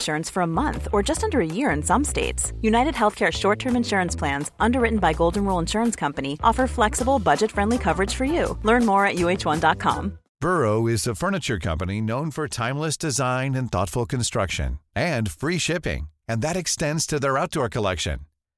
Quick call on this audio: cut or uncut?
cut